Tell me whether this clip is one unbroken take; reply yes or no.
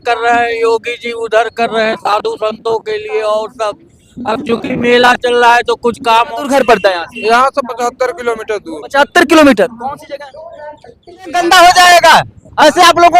no